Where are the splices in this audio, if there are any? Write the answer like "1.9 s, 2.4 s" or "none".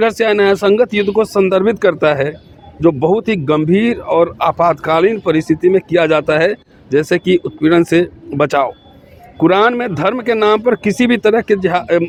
none